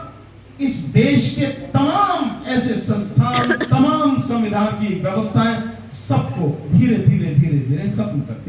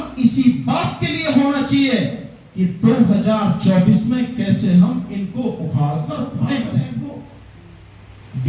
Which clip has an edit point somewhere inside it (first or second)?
second